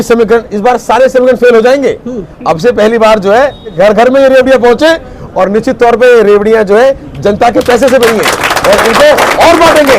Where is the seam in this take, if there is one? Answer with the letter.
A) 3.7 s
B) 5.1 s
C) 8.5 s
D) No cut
A